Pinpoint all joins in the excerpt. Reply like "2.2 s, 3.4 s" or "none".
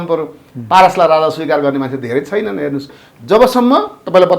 3.0 s